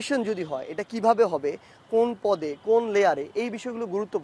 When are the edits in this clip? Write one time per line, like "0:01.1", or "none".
none